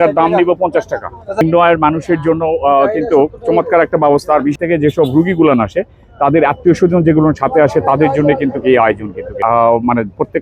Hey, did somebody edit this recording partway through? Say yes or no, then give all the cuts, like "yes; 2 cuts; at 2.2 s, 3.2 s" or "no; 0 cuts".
yes; 3 cuts; at 1.4 s, 4.6 s, 9.3 s